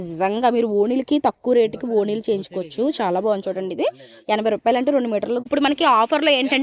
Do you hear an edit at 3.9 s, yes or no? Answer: no